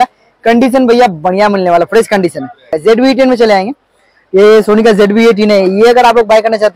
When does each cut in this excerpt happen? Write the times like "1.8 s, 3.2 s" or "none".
2.8 s